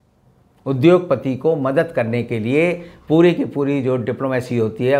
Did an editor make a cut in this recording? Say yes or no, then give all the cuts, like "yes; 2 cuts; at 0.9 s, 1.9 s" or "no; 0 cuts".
no; 0 cuts